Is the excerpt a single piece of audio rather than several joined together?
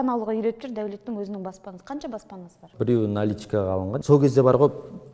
no; 2 cuts; at 2.7 s, 3.9 s

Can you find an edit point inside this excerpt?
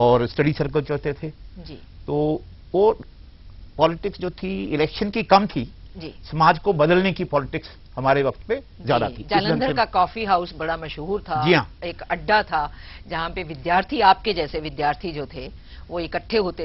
no; 0 cuts

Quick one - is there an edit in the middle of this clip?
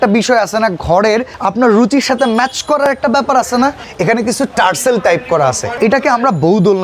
yes; 3 cuts; at 1.4 s, 3.9 s, 5.7 s

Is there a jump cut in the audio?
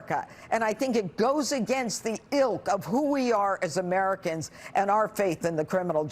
no; 0 cuts

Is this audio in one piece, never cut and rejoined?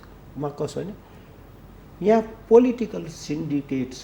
yes; 0 cuts

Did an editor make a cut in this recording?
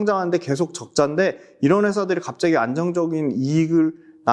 no; 0 cuts

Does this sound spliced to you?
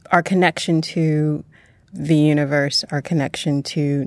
no; 0 cuts

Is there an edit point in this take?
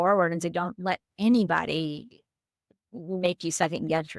no; 0 cuts

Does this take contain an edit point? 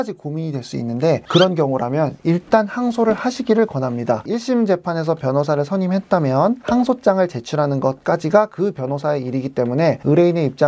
yes; 1 cut; at 4.2 s

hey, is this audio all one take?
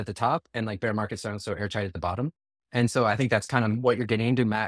yes; 0 cuts

